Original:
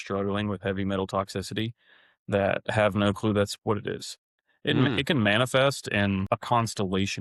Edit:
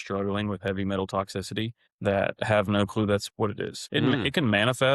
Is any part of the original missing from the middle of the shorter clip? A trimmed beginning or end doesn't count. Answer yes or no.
yes